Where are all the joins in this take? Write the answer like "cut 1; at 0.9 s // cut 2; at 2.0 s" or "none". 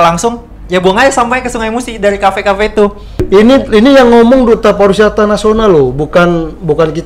cut 1; at 3.1 s